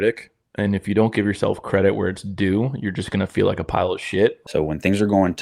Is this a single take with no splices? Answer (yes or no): no